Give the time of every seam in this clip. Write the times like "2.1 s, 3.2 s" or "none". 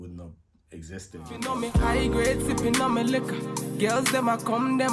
1.2 s